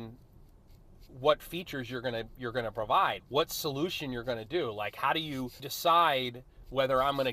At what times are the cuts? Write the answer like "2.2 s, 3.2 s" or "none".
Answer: 3.2 s, 5.7 s